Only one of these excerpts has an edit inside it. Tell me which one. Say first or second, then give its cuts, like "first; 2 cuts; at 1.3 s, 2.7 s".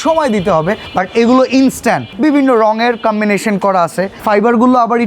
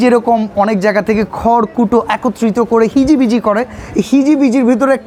first; 3 cuts; at 0.8 s, 2.1 s, 4.2 s